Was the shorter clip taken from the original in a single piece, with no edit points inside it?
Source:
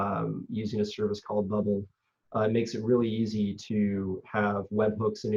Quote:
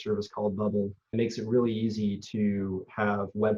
no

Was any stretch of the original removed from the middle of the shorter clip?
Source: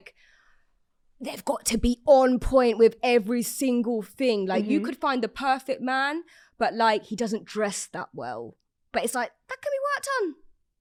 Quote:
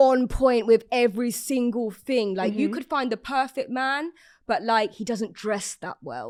no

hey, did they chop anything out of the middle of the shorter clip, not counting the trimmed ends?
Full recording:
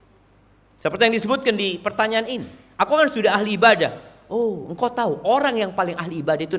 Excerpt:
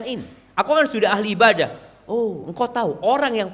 no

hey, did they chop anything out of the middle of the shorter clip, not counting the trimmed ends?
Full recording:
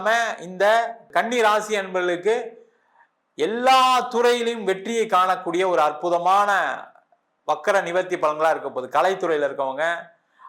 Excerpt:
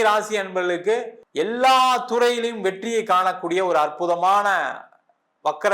yes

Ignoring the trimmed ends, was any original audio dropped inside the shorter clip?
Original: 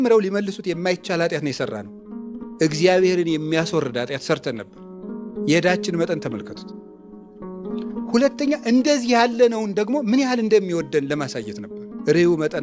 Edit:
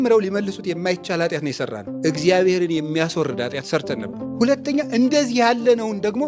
yes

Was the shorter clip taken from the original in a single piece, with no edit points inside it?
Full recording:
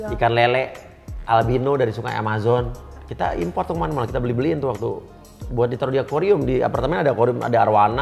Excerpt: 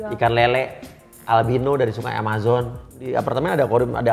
no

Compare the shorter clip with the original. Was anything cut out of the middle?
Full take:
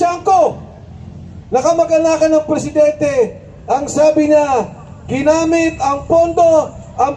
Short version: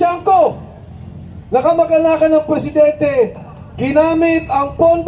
yes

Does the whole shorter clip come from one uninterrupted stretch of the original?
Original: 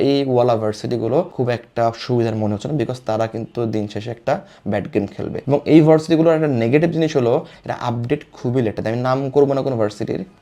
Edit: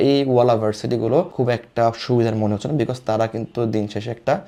yes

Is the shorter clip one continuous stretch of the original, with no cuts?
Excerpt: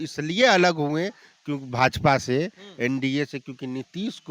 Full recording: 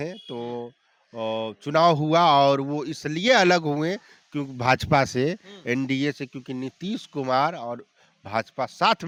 yes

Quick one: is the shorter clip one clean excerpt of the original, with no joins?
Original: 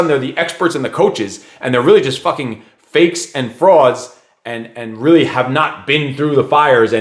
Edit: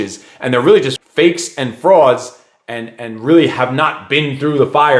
no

